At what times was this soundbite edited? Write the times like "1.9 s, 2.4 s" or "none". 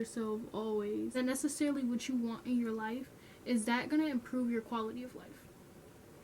1.2 s